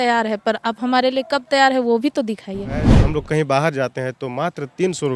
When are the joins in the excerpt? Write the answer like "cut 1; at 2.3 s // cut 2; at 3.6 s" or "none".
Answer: cut 1; at 2.9 s

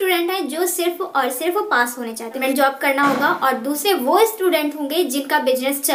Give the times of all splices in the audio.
cut 1; at 2.4 s

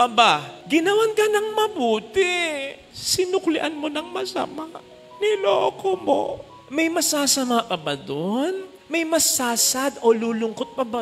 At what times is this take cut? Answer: cut 1; at 6.6 s

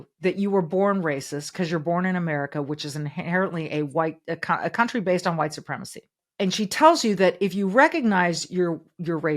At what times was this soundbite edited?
cut 1; at 6.2 s

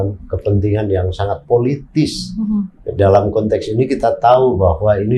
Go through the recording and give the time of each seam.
none

